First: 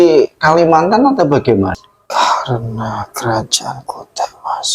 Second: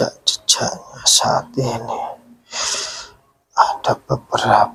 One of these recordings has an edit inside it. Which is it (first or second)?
first